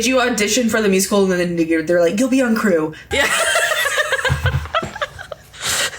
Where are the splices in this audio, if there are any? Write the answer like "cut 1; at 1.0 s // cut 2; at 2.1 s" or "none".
cut 1; at 3.0 s